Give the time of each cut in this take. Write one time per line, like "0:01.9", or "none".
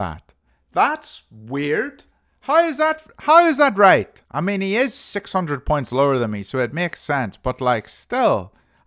0:04.2